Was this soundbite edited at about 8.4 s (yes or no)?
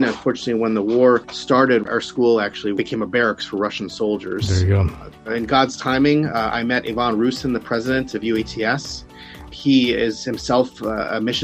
no